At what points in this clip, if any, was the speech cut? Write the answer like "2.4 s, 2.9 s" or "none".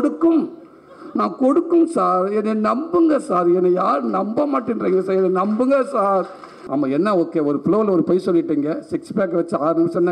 6.5 s